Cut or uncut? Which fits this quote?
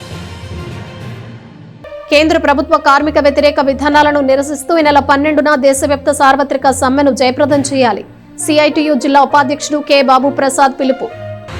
cut